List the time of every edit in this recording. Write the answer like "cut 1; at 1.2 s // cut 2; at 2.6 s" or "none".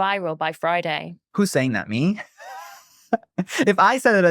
cut 1; at 1.1 s